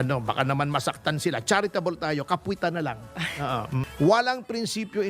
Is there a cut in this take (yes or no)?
yes